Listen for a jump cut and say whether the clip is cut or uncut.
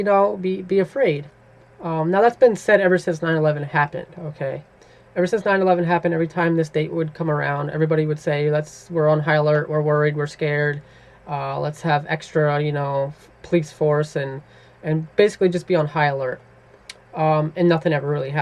cut